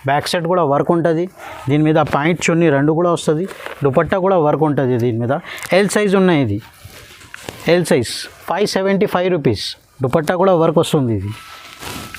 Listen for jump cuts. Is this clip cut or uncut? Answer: uncut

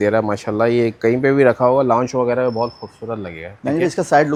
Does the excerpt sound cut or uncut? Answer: uncut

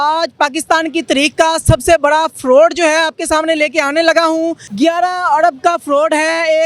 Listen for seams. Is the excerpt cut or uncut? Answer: cut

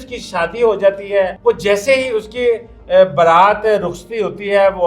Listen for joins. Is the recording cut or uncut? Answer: cut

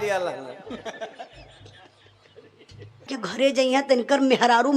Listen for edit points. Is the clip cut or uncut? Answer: cut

